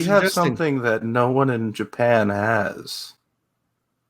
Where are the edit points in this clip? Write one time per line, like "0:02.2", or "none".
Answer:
none